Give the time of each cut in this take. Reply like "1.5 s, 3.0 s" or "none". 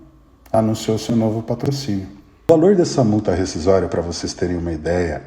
2.4 s